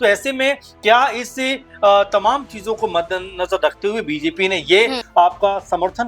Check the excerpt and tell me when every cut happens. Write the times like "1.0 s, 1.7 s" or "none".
5.0 s

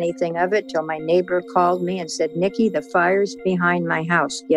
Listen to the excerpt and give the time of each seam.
none

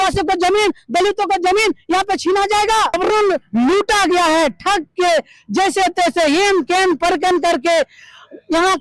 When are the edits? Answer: 3.0 s

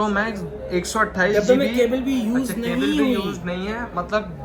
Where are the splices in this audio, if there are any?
none

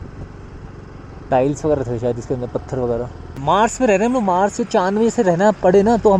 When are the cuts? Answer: 3.4 s

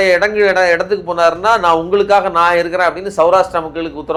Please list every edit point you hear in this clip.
none

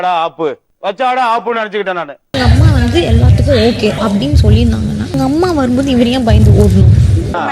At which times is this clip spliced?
2.2 s

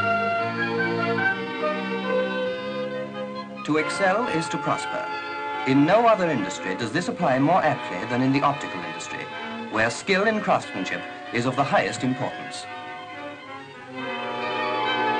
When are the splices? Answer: 5.9 s

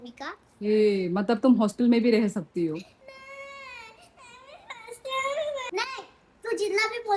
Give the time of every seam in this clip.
5.7 s

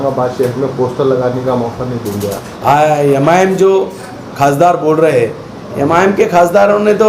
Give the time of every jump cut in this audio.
2.5 s

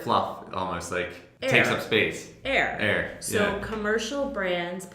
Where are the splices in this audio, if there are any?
1.2 s

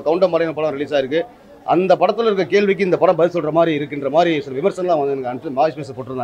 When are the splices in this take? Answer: none

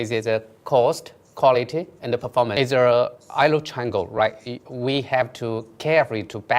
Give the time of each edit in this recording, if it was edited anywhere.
2.5 s

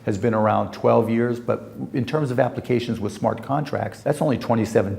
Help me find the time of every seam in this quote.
3.9 s

